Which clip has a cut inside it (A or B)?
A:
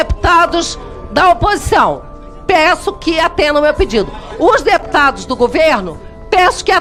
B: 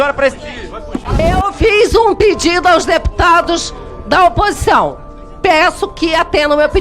B